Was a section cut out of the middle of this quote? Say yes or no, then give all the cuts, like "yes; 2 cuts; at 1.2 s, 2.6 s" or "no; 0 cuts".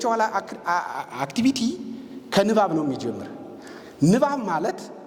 no; 0 cuts